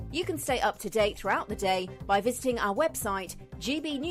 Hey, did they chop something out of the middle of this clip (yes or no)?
no